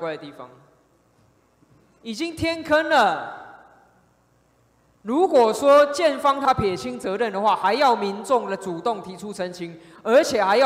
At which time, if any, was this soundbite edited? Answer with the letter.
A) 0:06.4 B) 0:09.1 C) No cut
A